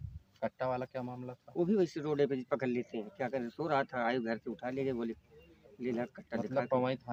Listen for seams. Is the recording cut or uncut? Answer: uncut